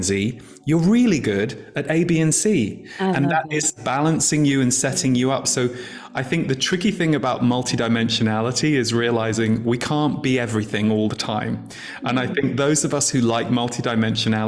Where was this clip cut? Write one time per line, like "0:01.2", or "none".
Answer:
0:03.8